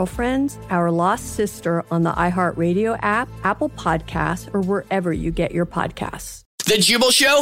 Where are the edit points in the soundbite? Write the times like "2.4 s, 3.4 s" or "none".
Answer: 6.5 s